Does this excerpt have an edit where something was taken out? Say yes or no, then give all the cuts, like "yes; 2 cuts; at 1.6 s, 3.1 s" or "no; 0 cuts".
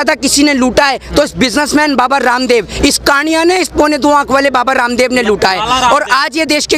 no; 0 cuts